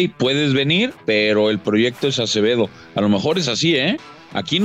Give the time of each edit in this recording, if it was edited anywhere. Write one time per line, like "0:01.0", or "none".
0:01.0